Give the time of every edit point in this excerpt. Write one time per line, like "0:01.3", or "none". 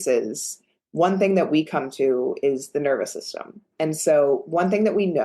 0:03.7